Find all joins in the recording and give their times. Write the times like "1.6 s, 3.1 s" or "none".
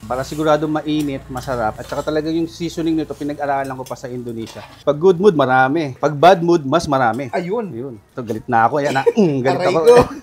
4.8 s